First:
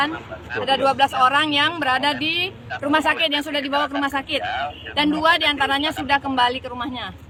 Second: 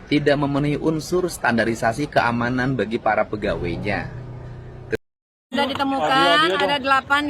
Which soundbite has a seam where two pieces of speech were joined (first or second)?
second